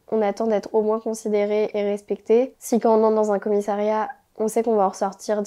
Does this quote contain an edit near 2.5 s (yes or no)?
yes